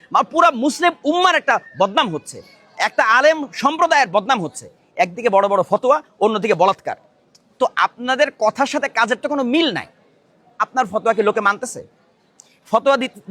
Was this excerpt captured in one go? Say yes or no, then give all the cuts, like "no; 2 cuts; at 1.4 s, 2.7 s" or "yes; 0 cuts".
no; 1 cut; at 10.5 s